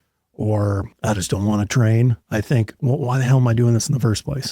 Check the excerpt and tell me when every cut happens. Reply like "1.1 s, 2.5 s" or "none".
0.9 s, 2.6 s